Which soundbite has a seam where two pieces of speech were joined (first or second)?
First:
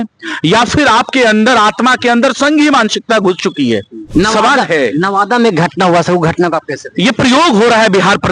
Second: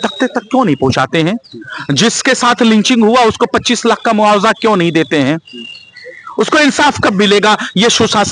first